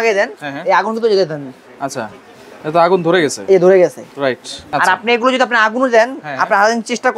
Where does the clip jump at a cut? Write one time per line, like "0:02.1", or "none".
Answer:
0:04.6